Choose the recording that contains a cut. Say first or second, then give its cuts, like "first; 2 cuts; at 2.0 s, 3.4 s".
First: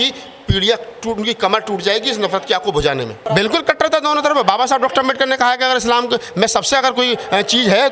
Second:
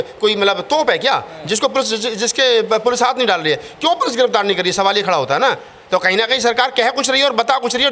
first; 1 cut; at 3.2 s